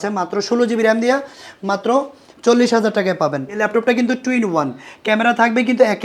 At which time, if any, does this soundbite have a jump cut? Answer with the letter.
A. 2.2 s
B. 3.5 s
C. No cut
B